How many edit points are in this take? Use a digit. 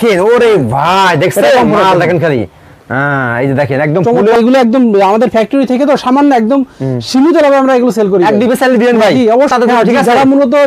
2